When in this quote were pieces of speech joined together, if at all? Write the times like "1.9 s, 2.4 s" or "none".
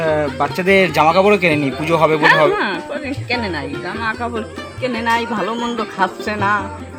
none